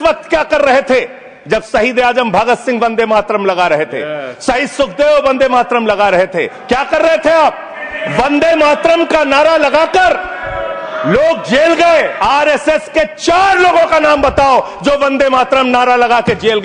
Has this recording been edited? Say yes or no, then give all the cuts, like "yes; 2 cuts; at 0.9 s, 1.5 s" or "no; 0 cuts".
yes; 2 cuts; at 6.6 s, 12.1 s